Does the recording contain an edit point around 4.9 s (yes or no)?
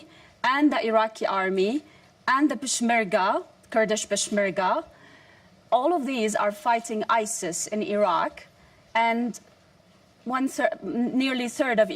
no